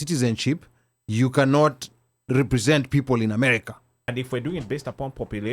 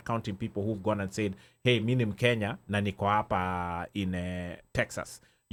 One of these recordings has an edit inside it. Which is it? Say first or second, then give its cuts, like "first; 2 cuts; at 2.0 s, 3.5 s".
first; 1 cut; at 3.9 s